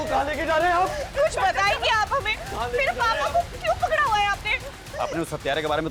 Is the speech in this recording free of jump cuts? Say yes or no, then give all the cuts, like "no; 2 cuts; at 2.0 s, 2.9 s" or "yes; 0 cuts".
yes; 0 cuts